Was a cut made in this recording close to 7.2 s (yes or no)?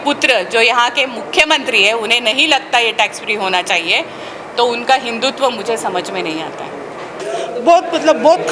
yes